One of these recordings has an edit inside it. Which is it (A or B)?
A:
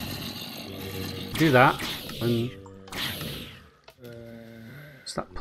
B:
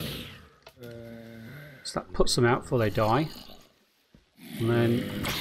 A